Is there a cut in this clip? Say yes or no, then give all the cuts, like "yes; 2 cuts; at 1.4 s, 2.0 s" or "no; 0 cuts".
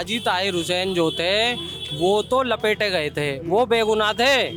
no; 0 cuts